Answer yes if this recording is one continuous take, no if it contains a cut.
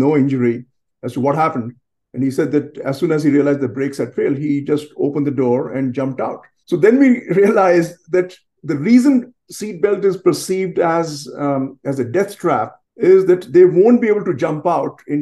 no